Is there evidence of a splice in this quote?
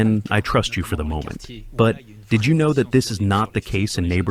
no; 0 cuts

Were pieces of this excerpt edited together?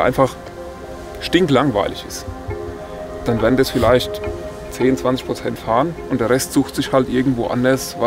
no; 0 cuts

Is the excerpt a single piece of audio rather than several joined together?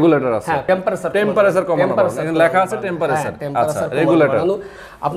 yes; 0 cuts

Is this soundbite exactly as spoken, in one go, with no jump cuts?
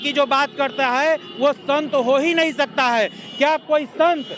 yes; 0 cuts

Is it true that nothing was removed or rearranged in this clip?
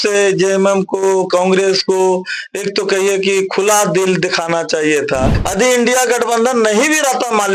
no; 1 cut; at 5.4 s

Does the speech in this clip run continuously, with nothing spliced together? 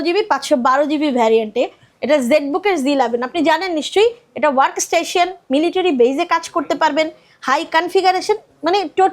no; 1 cut; at 1.9 s

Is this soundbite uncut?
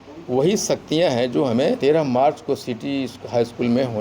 no; 1 cut; at 1.8 s

